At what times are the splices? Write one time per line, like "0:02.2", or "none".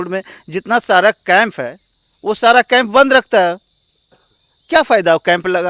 none